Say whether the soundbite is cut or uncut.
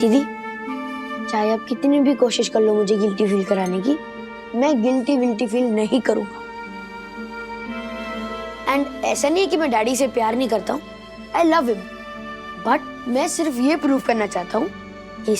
uncut